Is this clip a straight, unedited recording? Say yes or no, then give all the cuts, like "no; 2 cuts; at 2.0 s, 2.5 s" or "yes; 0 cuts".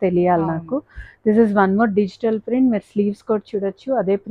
yes; 0 cuts